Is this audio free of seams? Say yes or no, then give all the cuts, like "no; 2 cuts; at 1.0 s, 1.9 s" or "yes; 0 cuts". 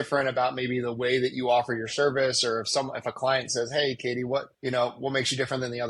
no; 1 cut; at 4.5 s